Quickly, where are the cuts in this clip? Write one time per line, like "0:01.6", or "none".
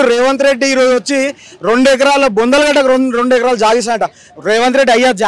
none